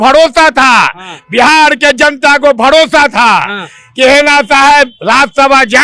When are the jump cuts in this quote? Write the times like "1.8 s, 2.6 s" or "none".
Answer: none